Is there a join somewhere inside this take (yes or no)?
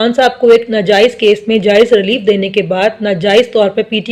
no